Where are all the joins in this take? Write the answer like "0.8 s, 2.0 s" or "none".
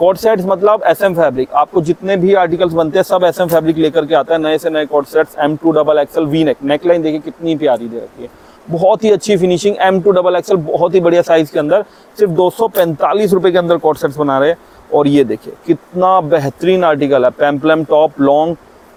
none